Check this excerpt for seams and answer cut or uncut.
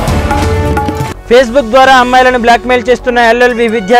cut